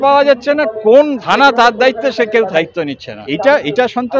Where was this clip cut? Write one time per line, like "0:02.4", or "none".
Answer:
0:03.2

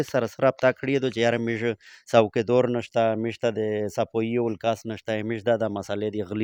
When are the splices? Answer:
none

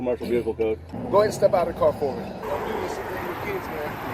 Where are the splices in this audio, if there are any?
0:00.9
0:02.5

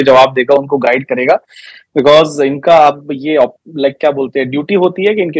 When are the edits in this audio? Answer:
none

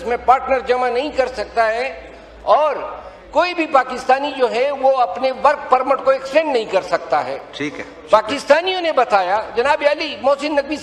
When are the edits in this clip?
none

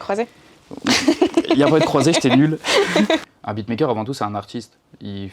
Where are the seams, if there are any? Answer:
0:03.2

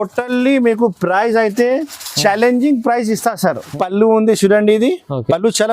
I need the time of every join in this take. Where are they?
0:03.7

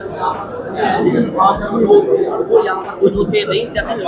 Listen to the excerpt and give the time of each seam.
none

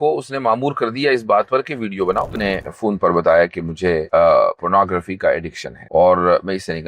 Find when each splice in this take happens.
0:02.3

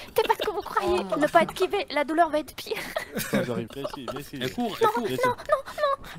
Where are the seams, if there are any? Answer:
0:03.7

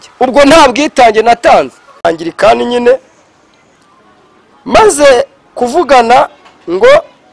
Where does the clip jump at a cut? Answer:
0:02.0

